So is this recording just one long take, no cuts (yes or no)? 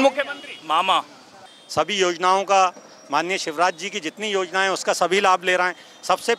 no